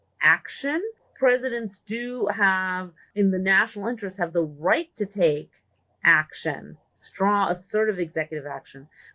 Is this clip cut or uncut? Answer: cut